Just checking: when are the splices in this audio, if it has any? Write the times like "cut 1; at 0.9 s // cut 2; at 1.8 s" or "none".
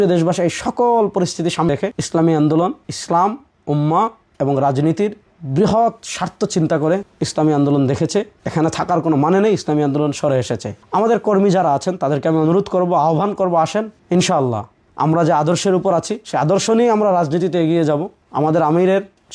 cut 1; at 1.7 s